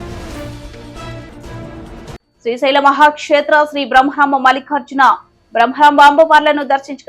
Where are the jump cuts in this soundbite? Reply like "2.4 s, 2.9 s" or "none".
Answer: 2.1 s